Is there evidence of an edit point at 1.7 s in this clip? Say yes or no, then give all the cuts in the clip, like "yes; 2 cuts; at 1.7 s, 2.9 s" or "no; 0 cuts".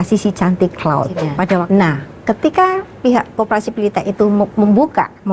yes; 1 cut; at 1.7 s